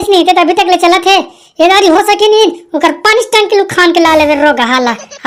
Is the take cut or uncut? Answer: uncut